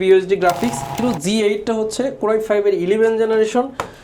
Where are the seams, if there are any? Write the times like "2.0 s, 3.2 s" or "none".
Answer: 0.9 s